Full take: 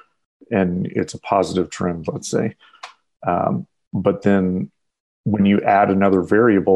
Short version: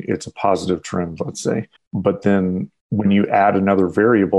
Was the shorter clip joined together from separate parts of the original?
yes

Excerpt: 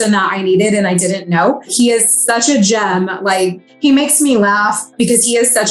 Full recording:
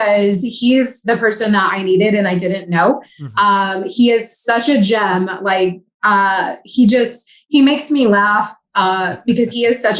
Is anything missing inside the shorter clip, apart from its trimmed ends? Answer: yes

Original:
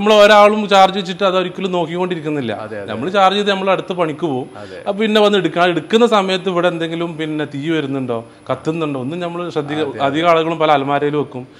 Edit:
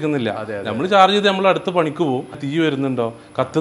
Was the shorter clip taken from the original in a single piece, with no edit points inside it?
no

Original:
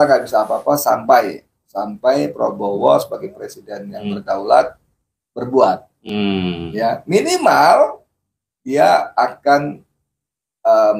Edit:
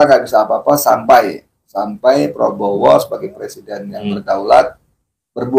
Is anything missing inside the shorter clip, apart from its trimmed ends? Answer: no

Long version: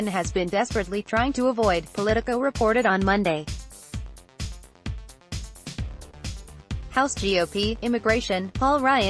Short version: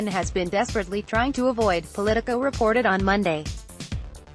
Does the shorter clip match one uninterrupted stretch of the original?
no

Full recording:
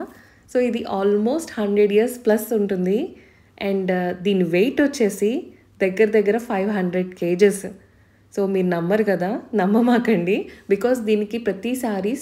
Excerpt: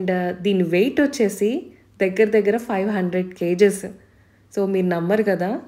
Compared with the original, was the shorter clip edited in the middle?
no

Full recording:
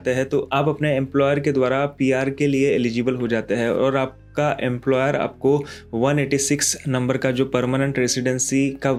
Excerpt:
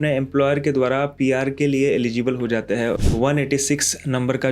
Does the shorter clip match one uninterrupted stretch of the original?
no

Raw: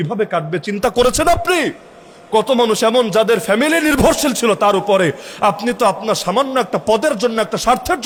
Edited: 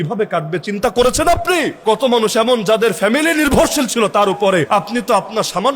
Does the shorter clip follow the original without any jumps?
no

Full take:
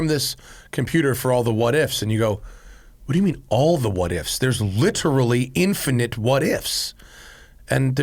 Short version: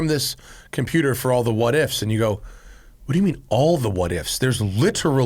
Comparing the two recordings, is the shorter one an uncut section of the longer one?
yes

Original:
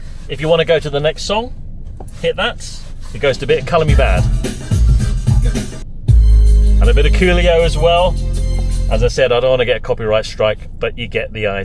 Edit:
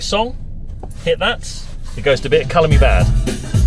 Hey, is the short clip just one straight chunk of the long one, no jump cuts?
yes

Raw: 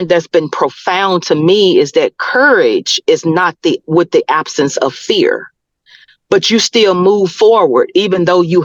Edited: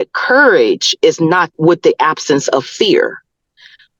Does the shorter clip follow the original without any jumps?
no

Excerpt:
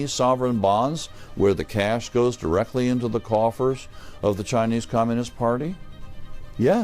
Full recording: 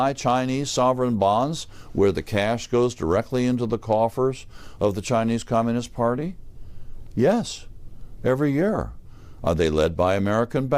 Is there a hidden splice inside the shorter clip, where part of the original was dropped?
no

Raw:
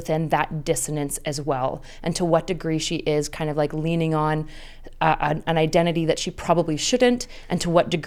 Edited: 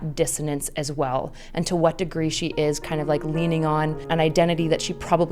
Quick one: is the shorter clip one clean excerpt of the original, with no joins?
no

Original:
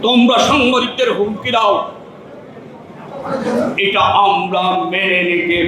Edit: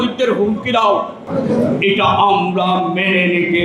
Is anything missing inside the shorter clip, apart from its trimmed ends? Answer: yes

